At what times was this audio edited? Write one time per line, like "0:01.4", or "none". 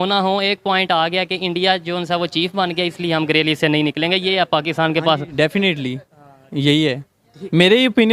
none